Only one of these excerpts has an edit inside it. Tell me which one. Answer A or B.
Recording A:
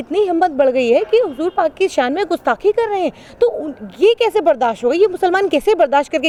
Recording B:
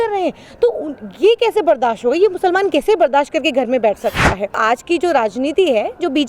B